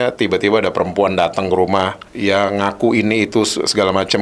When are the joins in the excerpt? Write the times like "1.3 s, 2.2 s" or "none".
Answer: 2.0 s